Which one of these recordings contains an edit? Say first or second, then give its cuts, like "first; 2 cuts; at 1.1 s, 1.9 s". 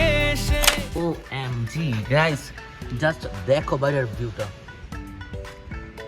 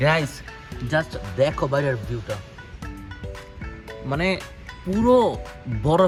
first; 1 cut; at 1.0 s